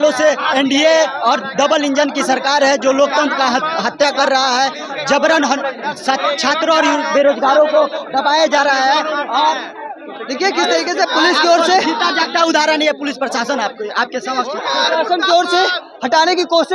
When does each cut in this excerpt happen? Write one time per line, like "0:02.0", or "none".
none